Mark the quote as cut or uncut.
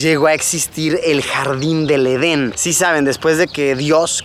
uncut